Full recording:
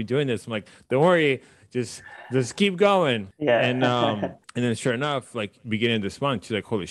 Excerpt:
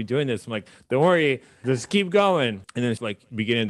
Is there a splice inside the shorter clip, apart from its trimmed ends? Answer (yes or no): yes